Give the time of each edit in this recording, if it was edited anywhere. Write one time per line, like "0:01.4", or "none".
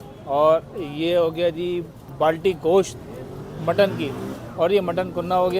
0:02.1

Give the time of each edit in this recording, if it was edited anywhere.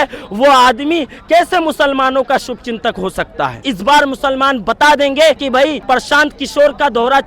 0:03.6
0:05.5

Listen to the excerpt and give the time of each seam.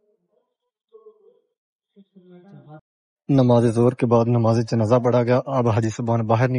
0:02.8

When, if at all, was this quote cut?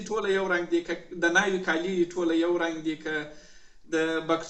none

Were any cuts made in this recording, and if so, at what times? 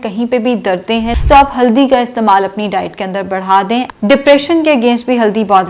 0:01.1
0:03.9

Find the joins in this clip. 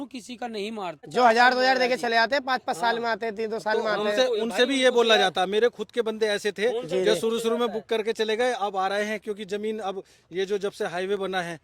0:01.0

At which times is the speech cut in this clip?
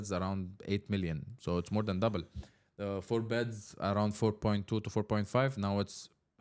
none

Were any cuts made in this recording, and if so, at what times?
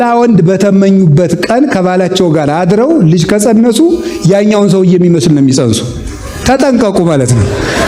none

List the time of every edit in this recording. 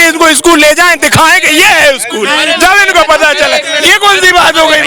none

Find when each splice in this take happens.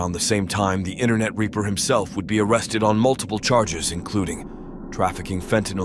none

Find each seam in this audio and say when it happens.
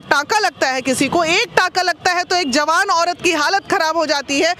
none

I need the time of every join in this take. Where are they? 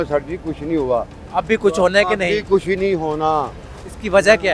none

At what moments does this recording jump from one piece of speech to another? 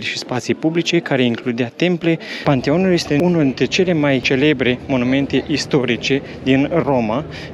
0:02.3

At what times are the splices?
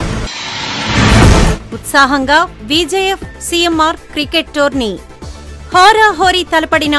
none

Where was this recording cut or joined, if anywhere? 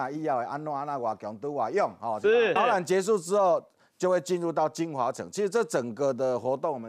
0:02.6

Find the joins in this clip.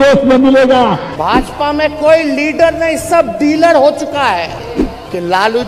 0:01.0
0:04.6

